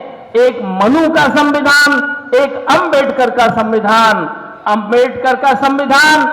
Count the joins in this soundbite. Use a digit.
0